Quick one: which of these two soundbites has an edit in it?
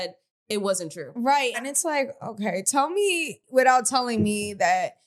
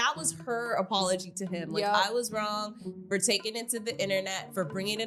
first; 2 cuts; at 1.6 s, 3.3 s

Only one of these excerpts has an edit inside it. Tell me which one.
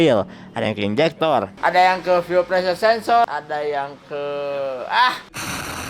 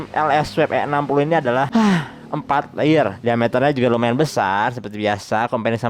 first; 1 cut; at 3.3 s

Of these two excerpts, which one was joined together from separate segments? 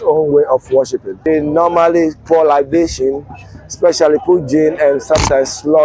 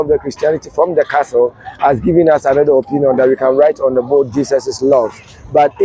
first; 1 cut; at 1.1 s

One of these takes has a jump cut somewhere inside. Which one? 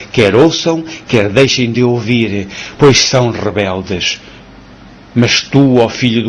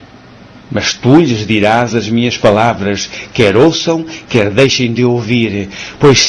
first; 1 cut; at 5.0 s

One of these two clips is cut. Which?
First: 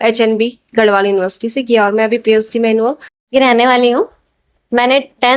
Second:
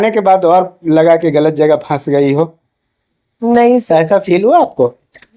first; 1 cut; at 3.2 s

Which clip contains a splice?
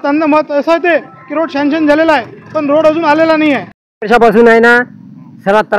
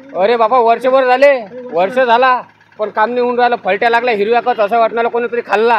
first; 1 cut; at 3.9 s

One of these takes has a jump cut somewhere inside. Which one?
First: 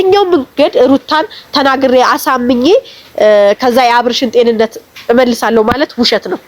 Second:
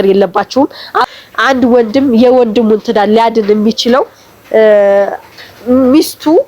second; 1 cut; at 1.1 s

